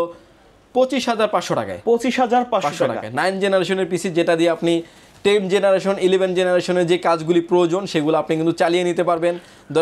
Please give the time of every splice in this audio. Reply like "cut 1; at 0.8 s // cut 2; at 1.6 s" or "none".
none